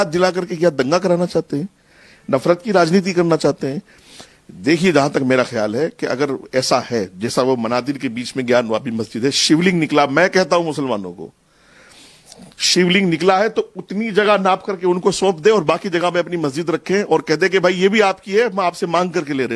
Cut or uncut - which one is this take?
uncut